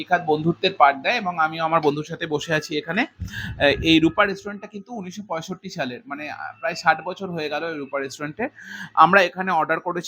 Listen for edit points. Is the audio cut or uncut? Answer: uncut